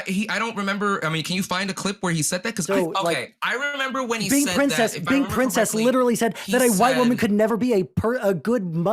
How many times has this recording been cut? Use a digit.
1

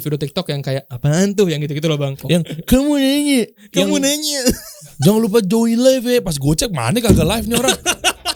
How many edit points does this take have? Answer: 2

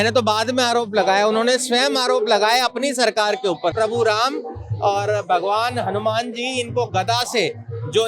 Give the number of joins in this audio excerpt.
1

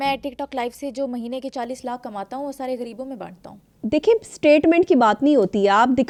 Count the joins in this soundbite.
0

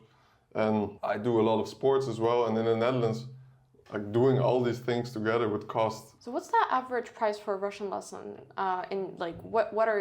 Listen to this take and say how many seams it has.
2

